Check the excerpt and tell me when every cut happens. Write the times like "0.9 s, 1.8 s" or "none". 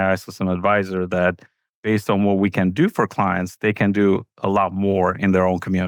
none